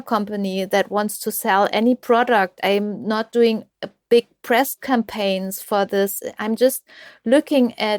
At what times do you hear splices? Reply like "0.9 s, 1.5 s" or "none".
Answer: none